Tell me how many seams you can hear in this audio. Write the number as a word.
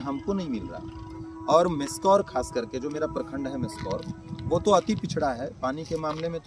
zero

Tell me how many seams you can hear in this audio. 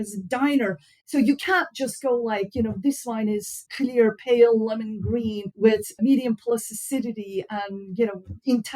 one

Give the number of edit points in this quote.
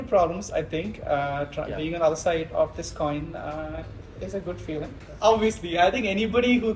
one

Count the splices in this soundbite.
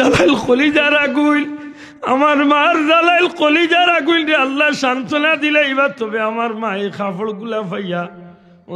zero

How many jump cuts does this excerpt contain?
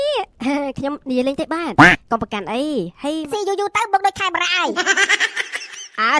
one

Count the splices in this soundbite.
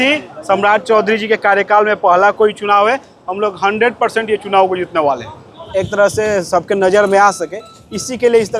one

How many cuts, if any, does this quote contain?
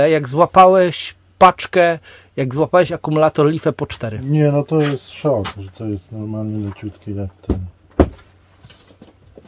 zero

